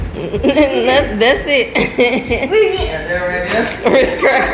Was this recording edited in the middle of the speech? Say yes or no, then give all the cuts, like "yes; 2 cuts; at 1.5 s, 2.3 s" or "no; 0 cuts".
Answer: no; 0 cuts